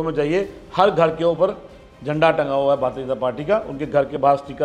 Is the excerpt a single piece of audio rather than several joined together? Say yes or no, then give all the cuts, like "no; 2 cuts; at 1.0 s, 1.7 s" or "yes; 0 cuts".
yes; 0 cuts